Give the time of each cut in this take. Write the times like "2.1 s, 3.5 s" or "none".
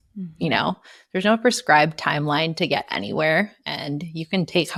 none